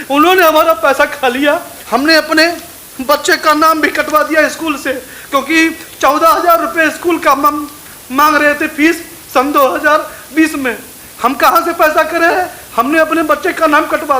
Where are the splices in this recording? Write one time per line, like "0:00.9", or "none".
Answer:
0:01.8
0:12.5